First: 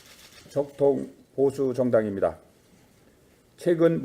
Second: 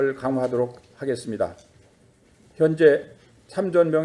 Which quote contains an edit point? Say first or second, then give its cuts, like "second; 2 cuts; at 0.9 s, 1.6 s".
second; 1 cut; at 2.7 s